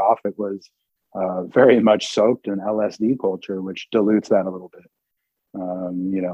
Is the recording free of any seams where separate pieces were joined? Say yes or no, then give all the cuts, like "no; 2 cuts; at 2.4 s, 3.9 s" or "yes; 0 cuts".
yes; 0 cuts